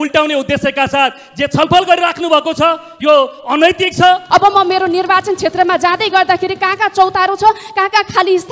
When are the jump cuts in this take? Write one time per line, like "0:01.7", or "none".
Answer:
0:04.2